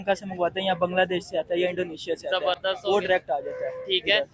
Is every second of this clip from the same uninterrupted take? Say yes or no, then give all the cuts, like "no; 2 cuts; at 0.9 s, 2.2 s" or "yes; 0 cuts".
yes; 0 cuts